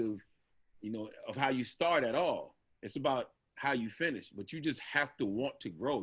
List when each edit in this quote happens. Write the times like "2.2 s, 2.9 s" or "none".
none